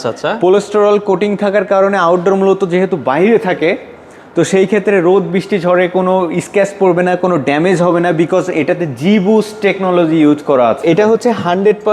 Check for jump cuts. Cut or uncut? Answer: cut